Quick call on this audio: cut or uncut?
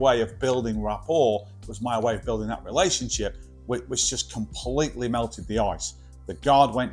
uncut